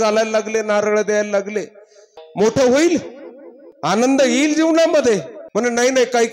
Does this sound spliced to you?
yes; 3 cuts; at 2.4 s, 4.0 s, 5.4 s

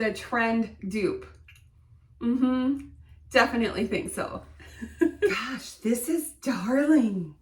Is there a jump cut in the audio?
yes; 1 cut; at 5.3 s

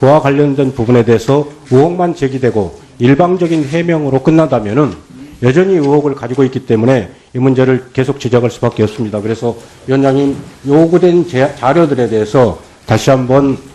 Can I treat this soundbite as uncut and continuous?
yes; 0 cuts

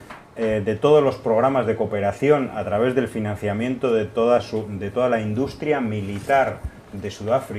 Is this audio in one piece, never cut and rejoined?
no; 1 cut; at 1.0 s

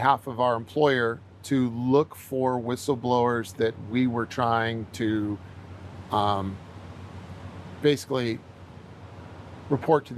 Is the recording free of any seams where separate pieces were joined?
yes; 0 cuts

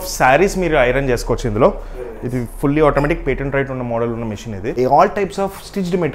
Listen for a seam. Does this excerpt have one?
yes; 1 cut; at 4.7 s

